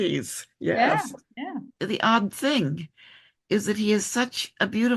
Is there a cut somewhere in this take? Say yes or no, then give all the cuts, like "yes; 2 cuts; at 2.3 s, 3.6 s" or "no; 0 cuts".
yes; 1 cut; at 1.7 s